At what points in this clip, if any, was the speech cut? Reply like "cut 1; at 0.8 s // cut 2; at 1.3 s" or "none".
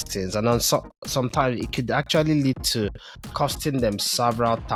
none